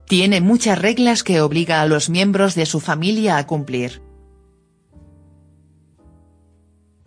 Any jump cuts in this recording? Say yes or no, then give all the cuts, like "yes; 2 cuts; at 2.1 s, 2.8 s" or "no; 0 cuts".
yes; 1 cut; at 2.3 s